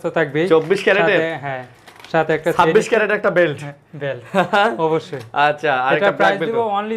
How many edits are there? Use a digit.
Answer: 0